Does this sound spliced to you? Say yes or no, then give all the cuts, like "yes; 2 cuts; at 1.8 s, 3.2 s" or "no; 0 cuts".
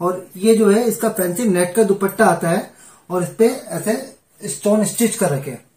no; 0 cuts